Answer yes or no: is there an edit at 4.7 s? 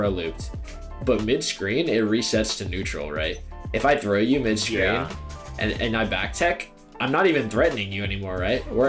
no